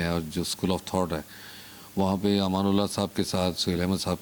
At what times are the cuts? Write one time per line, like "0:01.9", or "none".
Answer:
none